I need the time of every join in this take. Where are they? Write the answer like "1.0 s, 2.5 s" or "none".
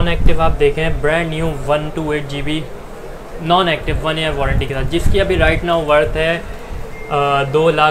none